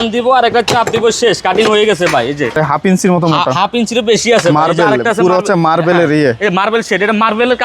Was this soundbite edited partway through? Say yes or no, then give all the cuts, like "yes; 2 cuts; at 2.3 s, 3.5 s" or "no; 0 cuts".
yes; 1 cut; at 2.5 s